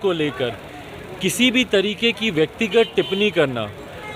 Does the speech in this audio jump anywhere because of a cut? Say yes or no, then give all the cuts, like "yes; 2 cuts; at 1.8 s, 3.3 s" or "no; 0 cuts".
no; 0 cuts